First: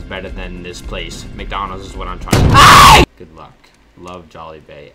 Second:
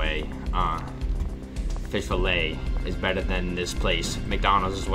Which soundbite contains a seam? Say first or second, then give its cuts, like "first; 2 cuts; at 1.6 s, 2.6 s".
first; 1 cut; at 3.1 s